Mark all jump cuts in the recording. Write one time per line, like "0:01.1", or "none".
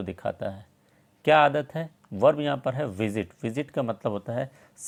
none